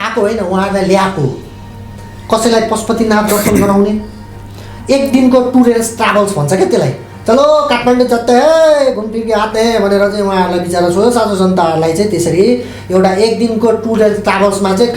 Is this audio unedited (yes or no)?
yes